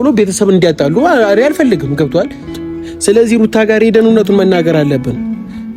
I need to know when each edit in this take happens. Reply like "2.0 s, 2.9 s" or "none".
2.5 s